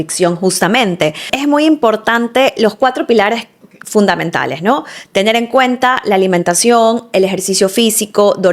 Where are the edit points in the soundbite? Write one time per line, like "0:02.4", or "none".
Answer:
0:01.3